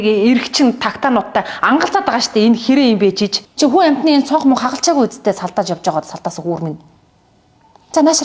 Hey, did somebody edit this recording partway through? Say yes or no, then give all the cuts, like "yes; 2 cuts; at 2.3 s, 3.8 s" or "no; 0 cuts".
yes; 1 cut; at 3.3 s